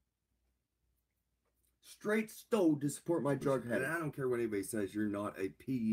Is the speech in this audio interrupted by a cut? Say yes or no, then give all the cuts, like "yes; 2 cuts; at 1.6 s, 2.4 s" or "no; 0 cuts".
yes; 1 cut; at 3.8 s